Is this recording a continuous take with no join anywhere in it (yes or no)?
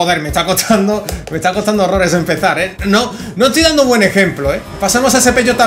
no